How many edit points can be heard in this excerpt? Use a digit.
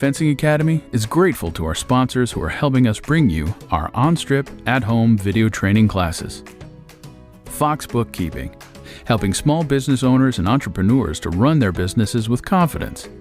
0